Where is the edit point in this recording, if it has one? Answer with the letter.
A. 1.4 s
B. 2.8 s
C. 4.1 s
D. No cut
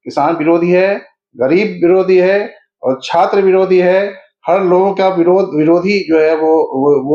D